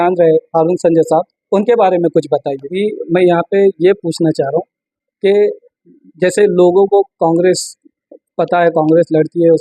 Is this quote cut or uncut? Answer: cut